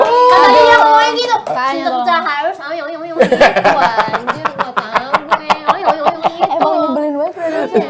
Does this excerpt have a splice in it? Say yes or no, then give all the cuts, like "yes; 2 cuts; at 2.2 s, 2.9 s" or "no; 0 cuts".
no; 0 cuts